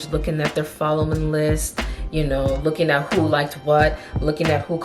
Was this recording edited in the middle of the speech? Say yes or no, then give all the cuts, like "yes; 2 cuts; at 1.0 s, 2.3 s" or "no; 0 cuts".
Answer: no; 0 cuts